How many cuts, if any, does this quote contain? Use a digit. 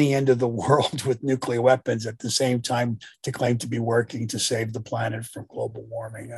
0